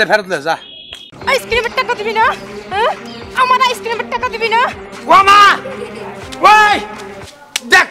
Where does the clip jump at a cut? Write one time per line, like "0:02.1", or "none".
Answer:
0:01.1
0:05.0